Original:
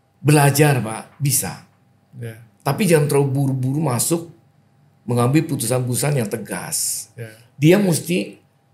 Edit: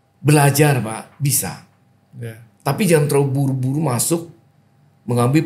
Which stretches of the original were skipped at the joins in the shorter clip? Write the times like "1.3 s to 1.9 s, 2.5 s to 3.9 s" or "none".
none